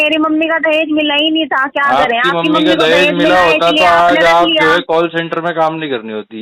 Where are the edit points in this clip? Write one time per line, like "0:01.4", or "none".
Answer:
none